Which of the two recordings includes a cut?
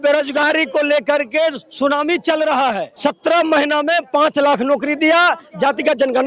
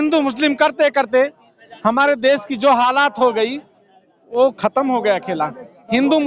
first; 1 cut; at 2.9 s

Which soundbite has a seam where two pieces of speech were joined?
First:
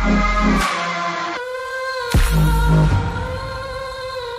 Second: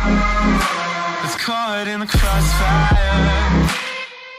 second; 1 cut; at 1.2 s

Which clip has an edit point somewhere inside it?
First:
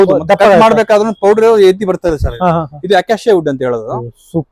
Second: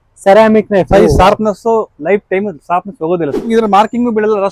second; 1 cut; at 3.5 s

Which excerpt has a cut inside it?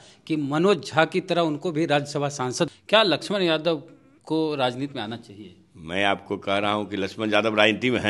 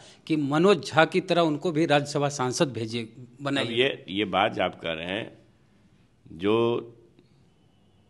first; 1 cut; at 2.8 s

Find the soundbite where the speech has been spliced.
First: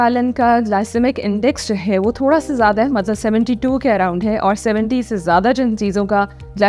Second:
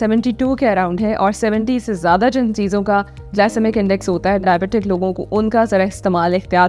second; 1 cut; at 4.4 s

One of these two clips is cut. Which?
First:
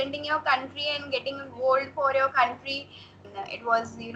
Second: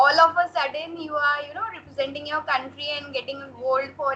first; 1 cut; at 3.2 s

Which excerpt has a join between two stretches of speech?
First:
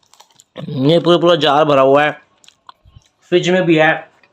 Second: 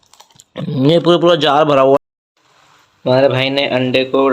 second; 1 cut; at 2.0 s

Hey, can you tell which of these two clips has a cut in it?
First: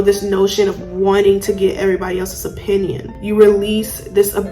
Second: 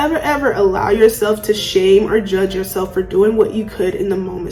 first; 1 cut; at 3.1 s

